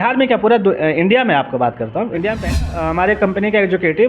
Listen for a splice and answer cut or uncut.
cut